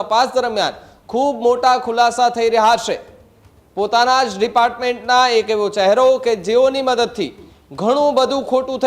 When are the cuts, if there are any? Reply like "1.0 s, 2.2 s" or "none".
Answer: none